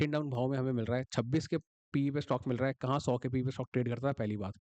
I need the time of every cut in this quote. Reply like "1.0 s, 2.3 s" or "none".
none